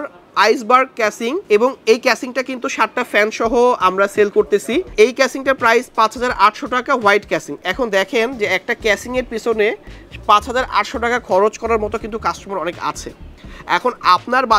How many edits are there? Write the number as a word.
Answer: zero